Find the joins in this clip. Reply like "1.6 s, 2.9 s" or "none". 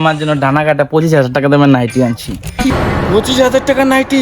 2.7 s